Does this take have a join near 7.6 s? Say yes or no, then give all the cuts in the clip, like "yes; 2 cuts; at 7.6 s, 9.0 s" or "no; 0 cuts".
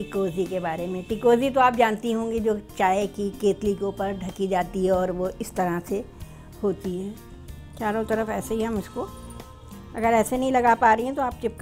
yes; 1 cut; at 7.6 s